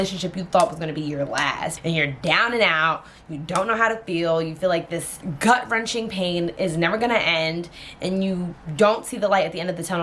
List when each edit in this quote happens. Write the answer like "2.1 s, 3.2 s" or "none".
1.8 s, 5.2 s